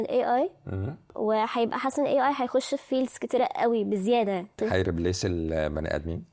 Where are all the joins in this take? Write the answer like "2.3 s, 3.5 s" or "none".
1.1 s